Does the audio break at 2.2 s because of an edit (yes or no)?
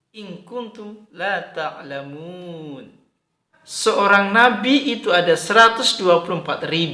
no